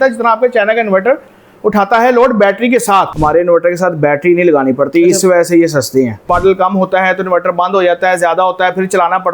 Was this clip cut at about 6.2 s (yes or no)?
yes